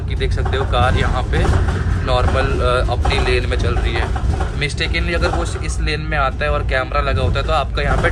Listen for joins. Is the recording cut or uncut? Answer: uncut